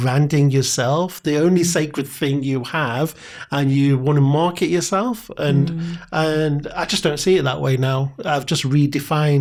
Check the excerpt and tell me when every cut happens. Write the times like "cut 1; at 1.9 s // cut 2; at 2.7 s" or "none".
none